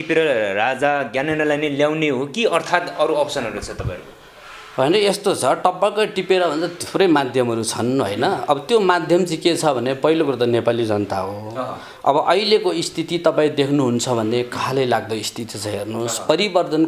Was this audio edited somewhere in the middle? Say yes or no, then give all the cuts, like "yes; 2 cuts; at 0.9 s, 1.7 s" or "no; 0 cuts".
no; 0 cuts